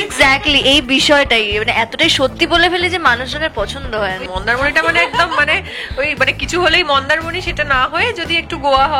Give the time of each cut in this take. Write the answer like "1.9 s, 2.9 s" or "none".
4.2 s